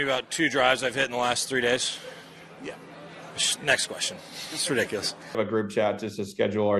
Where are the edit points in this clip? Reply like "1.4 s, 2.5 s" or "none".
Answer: 5.2 s